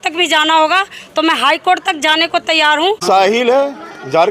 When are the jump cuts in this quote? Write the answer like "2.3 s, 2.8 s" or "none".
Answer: 3.0 s